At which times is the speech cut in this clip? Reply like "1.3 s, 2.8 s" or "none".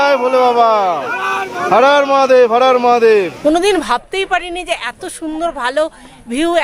3.3 s